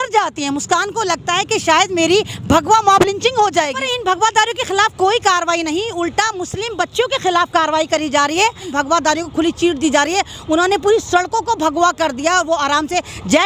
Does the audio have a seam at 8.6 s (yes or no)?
yes